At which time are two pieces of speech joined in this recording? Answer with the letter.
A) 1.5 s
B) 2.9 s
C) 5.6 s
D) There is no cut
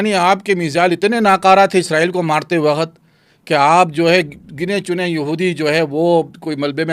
D